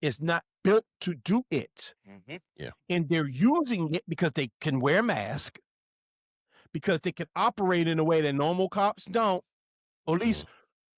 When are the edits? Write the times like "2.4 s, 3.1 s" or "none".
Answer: none